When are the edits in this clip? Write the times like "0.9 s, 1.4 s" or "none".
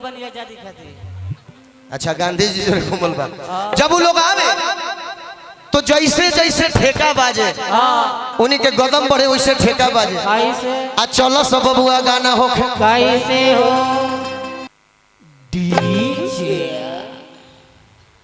14.8 s

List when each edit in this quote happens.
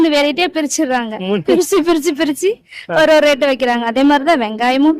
none

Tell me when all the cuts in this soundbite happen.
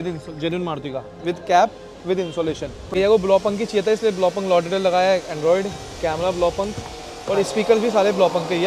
2.9 s

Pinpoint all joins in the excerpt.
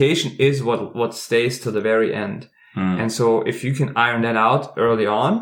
none

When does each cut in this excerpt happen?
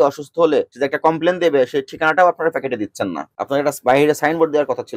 none

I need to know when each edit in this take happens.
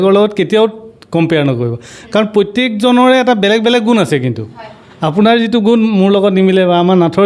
none

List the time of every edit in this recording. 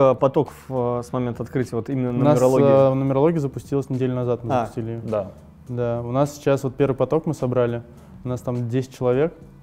none

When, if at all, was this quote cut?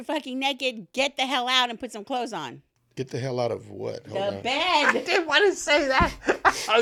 none

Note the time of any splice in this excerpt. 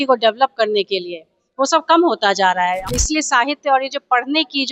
2.9 s

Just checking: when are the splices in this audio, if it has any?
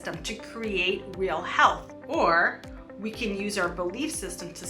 1.9 s

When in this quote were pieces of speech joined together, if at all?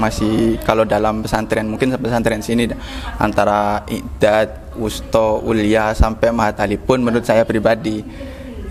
none

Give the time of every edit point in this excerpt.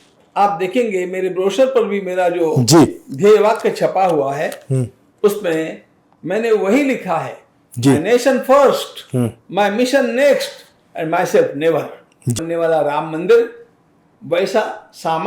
12.4 s

